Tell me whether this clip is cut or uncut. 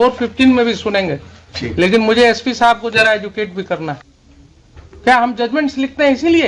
cut